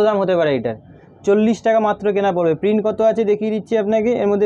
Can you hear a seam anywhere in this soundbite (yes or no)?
no